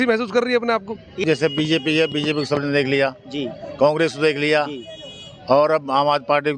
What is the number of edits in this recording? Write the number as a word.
one